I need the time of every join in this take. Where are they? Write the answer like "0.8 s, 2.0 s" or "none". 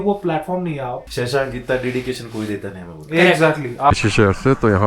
1.1 s, 3.9 s